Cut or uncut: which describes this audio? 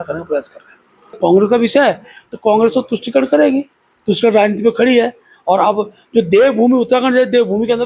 cut